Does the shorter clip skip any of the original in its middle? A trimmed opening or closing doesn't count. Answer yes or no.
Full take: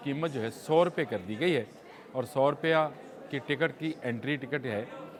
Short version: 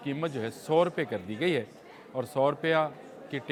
no